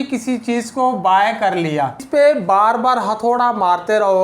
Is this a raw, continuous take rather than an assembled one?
no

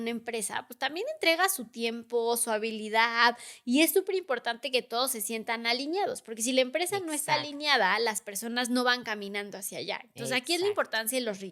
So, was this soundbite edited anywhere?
no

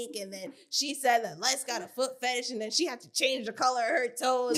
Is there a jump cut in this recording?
no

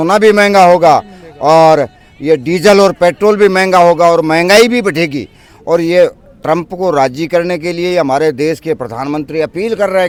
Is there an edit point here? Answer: no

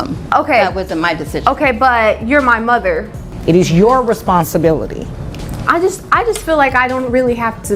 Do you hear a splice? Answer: yes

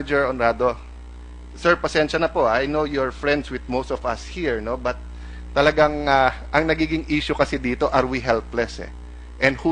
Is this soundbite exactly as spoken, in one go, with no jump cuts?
yes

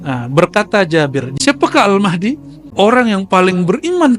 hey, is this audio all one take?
no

